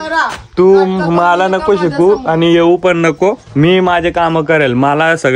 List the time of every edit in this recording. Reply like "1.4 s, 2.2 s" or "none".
none

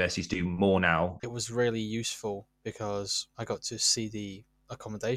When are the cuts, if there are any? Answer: 1.2 s, 3.2 s

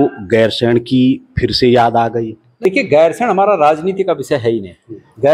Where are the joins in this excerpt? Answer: 2.7 s

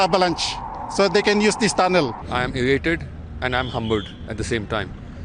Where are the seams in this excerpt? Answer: 2.2 s

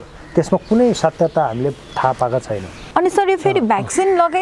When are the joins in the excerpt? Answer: 2.7 s

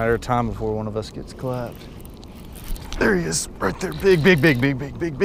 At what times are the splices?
none

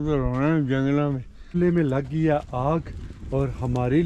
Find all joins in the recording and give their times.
1.6 s

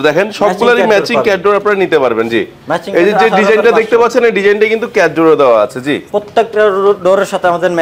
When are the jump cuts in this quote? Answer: none

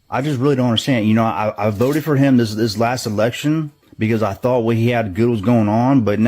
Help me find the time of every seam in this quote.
1.5 s

